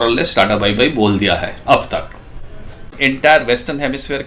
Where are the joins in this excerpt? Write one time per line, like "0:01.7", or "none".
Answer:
0:03.0